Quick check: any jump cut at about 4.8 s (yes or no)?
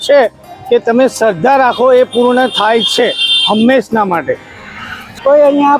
yes